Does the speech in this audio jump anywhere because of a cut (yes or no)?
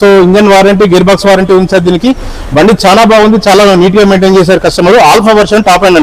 no